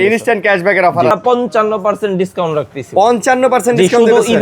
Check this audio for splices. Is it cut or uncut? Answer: cut